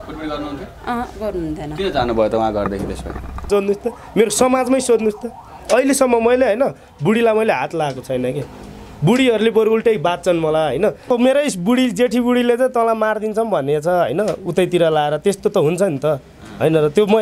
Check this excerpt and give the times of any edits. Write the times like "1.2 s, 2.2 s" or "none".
3.5 s, 11.1 s